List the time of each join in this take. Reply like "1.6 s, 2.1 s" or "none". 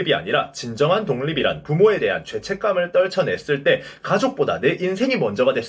none